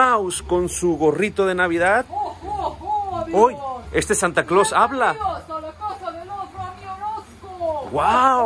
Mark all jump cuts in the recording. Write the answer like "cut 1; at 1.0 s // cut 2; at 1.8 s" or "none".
none